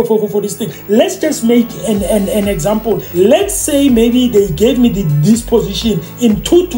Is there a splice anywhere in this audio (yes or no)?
yes